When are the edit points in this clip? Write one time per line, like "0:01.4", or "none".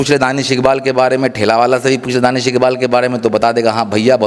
none